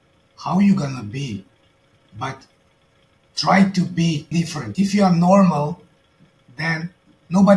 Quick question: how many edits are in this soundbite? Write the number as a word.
one